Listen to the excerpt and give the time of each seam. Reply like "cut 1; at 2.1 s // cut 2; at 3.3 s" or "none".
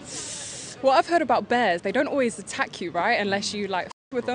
cut 1; at 3.3 s